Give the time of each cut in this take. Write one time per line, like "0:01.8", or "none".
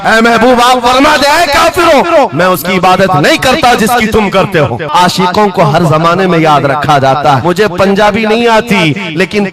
0:04.9
0:07.4